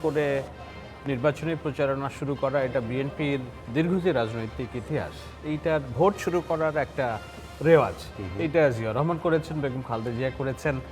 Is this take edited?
no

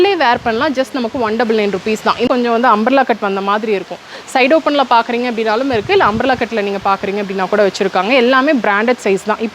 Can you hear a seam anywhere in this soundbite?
yes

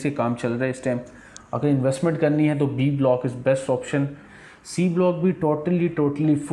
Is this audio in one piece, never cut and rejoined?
no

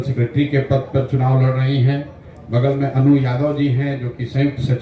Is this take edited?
no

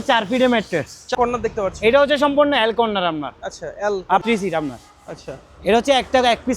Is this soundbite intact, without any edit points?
no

